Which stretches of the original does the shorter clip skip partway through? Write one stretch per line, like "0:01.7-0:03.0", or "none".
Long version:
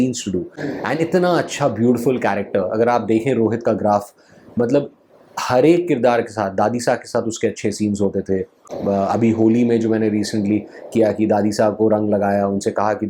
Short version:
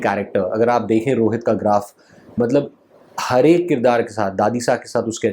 none